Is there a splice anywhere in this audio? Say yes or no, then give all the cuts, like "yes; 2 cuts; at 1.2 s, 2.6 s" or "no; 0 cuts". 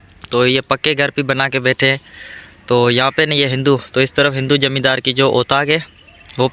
no; 0 cuts